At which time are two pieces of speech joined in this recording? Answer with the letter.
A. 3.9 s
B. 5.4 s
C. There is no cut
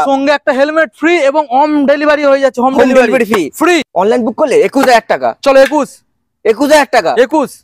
A